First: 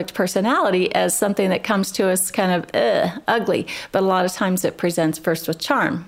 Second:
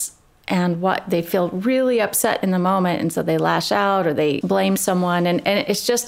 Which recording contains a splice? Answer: second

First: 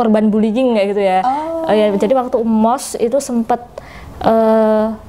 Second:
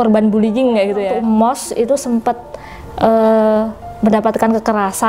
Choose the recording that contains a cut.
second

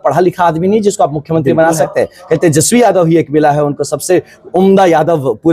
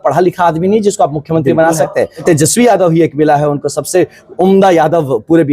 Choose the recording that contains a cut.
second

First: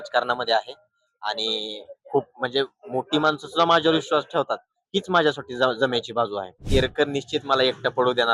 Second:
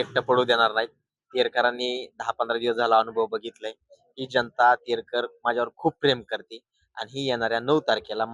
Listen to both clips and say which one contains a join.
first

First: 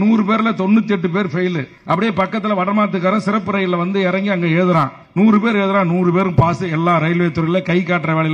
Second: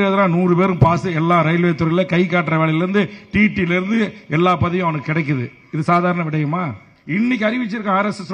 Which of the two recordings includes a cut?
second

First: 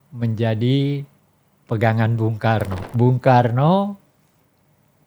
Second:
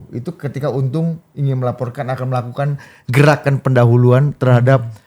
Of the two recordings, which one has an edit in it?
first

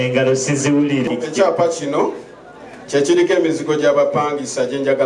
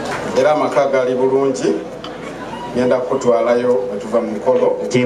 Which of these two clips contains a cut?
first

